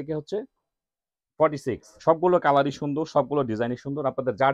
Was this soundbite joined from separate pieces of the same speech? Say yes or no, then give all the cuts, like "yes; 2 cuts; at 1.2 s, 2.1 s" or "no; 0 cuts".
yes; 1 cut; at 1.9 s